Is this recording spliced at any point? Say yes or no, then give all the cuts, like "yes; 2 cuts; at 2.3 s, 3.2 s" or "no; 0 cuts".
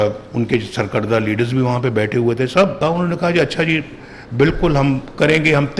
yes; 1 cut; at 2.8 s